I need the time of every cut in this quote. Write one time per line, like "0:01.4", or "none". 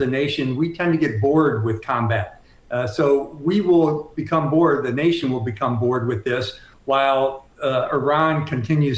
none